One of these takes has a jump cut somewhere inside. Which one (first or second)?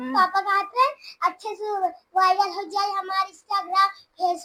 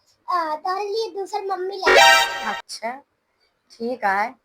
second